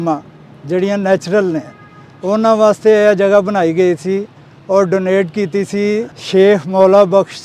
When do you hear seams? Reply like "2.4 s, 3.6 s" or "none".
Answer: 6.2 s